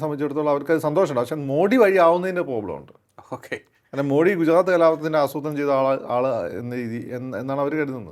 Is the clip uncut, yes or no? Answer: yes